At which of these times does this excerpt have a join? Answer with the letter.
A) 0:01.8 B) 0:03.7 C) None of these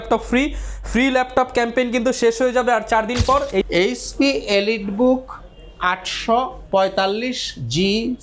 B